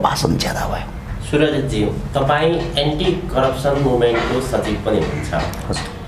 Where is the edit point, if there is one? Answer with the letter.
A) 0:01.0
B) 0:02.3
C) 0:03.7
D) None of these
D